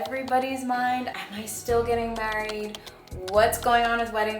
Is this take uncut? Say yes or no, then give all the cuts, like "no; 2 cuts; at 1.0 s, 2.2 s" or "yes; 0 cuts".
no; 1 cut; at 1.2 s